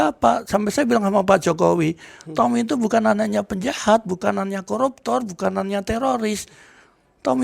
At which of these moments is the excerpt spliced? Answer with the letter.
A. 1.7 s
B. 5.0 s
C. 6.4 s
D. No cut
D